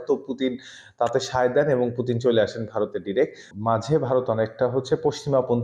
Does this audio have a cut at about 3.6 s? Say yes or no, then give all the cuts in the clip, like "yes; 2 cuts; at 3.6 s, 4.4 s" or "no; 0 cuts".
yes; 1 cut; at 3.6 s